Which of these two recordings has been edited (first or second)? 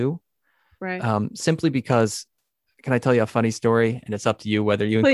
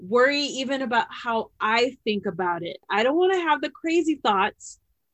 second